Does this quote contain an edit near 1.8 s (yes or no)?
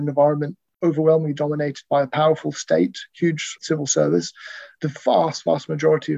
no